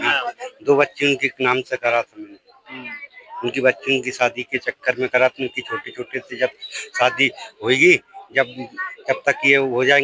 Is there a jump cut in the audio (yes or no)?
no